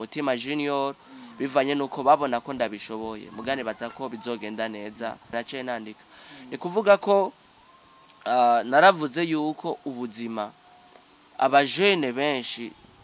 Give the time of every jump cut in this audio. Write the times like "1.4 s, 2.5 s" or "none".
5.3 s

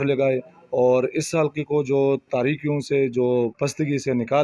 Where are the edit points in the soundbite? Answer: 3.5 s

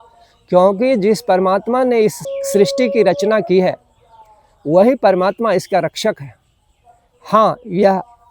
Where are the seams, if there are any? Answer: 2.2 s

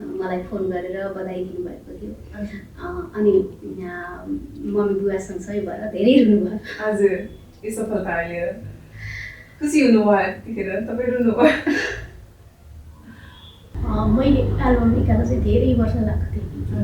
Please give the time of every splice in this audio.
13.7 s

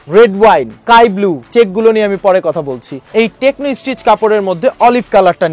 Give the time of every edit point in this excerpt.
3.1 s

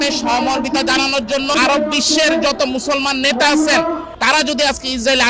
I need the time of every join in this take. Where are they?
1.5 s, 4.1 s

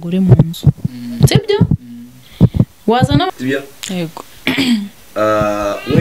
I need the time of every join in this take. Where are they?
3.3 s

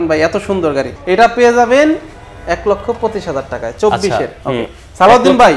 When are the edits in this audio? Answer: none

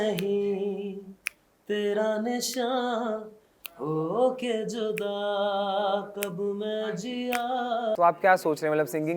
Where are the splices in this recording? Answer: 8.0 s

